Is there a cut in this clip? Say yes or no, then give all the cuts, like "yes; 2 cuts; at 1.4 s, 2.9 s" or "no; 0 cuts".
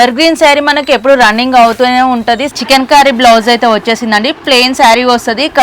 yes; 1 cut; at 2.5 s